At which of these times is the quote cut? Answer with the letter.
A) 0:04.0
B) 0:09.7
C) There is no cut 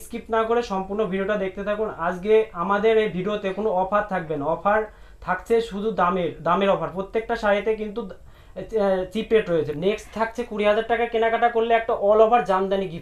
B